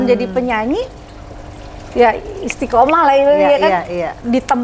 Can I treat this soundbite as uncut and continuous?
yes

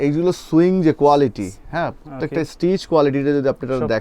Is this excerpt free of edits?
yes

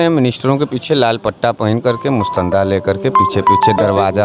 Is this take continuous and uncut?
yes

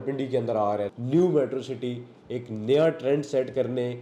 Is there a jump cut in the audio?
yes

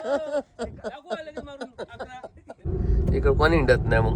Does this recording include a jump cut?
yes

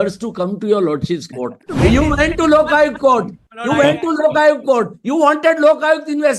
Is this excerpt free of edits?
no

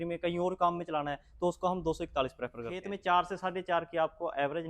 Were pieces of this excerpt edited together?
yes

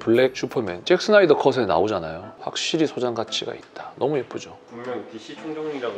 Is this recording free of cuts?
no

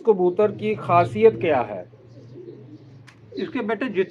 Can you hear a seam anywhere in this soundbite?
no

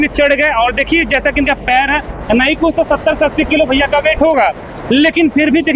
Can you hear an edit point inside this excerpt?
no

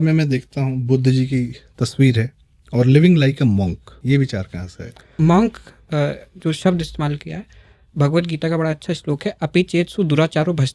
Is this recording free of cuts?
no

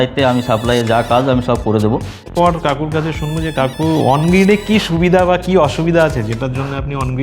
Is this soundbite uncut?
no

